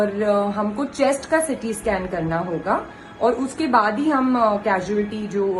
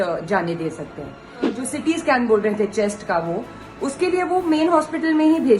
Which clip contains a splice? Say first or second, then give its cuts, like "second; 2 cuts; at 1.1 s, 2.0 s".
second; 1 cut; at 1.6 s